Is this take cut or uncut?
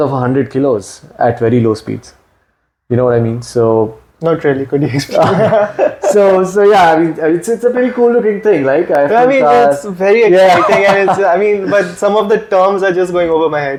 uncut